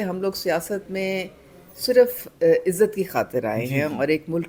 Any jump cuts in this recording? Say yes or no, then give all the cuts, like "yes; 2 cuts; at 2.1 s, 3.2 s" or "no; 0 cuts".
no; 0 cuts